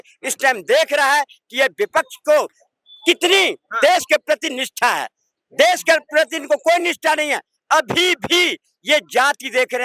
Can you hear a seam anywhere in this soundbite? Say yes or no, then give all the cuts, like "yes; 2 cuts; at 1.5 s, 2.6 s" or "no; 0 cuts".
no; 0 cuts